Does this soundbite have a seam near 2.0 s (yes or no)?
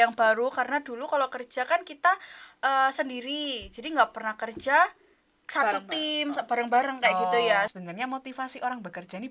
no